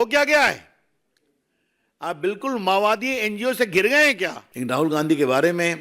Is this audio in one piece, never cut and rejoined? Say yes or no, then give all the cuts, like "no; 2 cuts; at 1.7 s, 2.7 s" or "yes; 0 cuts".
no; 1 cut; at 4.5 s